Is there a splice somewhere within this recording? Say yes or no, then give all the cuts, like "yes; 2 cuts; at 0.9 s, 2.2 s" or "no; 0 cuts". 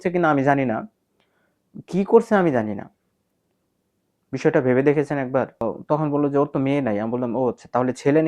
yes; 1 cut; at 5.6 s